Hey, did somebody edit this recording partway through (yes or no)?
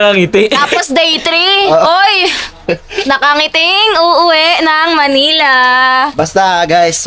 no